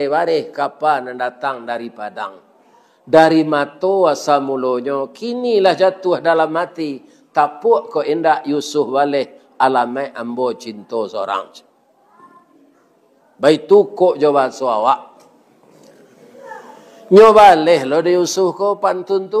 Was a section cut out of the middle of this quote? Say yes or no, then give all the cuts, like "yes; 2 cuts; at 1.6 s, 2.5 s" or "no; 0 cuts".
no; 0 cuts